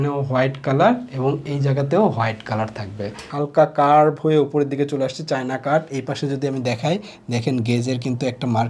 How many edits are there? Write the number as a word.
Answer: one